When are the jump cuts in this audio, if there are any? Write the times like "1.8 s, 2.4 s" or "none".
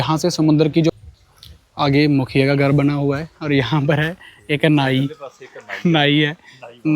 0.9 s